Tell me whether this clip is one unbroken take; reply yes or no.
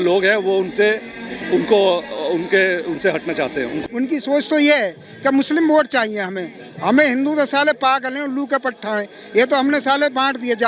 no